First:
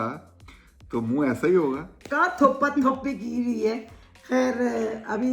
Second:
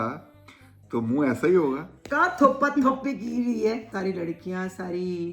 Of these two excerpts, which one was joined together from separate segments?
second; 1 cut; at 3.9 s

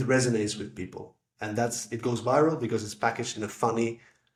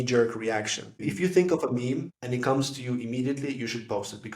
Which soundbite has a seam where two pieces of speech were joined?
second; 2 cuts; at 1.0 s, 2.2 s

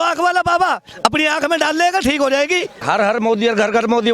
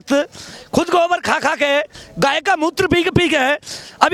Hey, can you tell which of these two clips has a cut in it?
first; 1 cut; at 2.8 s

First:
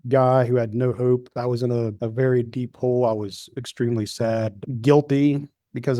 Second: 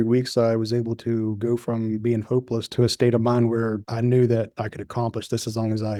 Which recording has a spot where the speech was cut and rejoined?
first; 2 cuts; at 1.3 s, 4.6 s

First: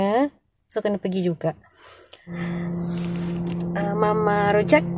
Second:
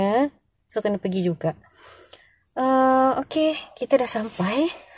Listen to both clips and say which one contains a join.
first; 1 cut; at 2.4 s

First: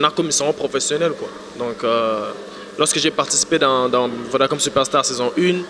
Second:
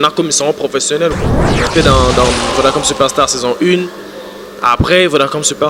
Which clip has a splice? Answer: second; 1 cut; at 1.7 s

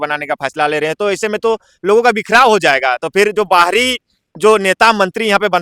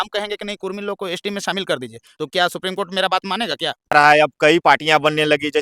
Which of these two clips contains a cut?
second; 1 cut; at 3.9 s

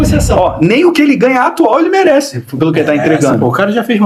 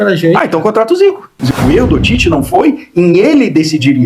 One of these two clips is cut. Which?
second; 1 cut; at 1.5 s

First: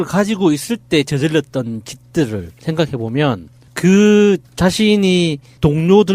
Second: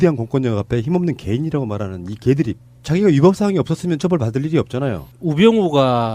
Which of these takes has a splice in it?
second; 1 cut; at 1.0 s

